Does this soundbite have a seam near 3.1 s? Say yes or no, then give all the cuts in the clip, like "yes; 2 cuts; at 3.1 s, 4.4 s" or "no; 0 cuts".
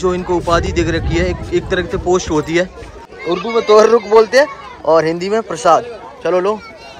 yes; 1 cut; at 3.1 s